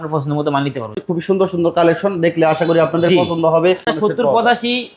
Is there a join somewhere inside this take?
yes; 2 cuts; at 1.0 s, 3.9 s

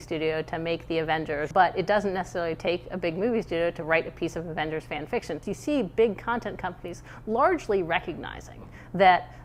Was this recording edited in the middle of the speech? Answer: yes; 2 cuts; at 1.5 s, 5.4 s

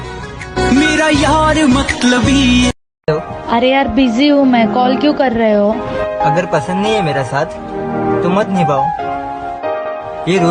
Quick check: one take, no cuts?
no; 1 cut; at 2.9 s

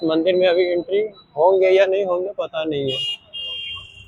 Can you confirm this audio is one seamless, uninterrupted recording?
yes; 0 cuts

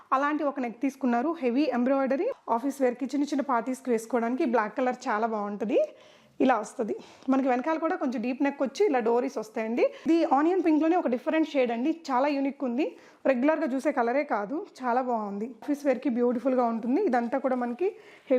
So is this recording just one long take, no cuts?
no; 3 cuts; at 2.3 s, 10.1 s, 15.6 s

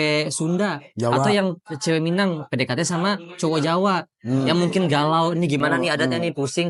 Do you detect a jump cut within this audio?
no; 0 cuts

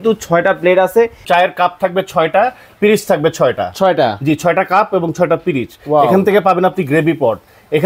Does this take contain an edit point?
yes; 1 cut; at 1.2 s

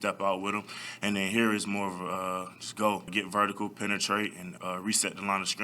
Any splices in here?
yes; 2 cuts; at 3.1 s, 4.5 s

